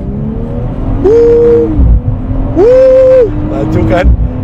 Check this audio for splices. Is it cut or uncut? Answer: uncut